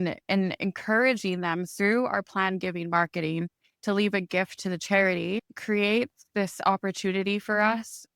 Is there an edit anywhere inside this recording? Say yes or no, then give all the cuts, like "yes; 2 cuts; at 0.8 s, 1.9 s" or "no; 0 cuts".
yes; 1 cut; at 5.5 s